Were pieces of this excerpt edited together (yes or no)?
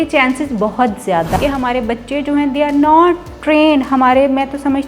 yes